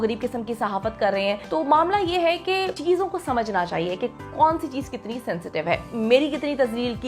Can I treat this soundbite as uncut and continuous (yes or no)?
no